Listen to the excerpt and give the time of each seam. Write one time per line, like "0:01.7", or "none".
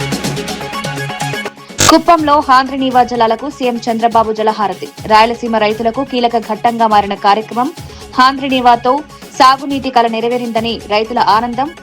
0:01.5